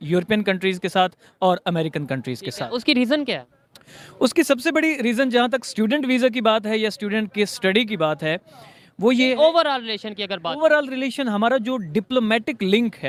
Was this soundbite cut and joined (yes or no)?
no